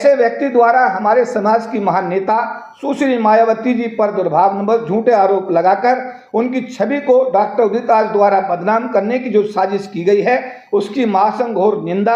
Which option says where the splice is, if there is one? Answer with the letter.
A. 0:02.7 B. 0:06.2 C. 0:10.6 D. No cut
D